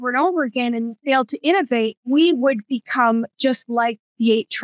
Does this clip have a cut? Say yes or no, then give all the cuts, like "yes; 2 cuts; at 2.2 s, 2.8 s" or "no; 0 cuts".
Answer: yes; 2 cuts; at 1.0 s, 2.0 s